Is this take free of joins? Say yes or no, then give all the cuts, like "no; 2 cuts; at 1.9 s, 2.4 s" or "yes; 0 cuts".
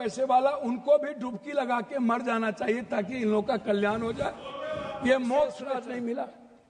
no; 1 cut; at 5.8 s